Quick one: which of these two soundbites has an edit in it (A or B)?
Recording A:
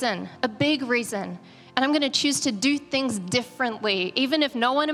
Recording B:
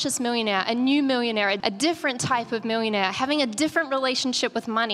B